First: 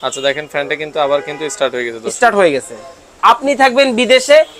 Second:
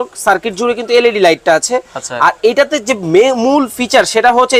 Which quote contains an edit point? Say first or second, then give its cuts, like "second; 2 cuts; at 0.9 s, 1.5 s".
first; 1 cut; at 3.2 s